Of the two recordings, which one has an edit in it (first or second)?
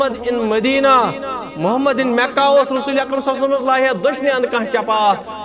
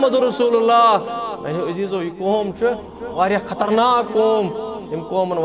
second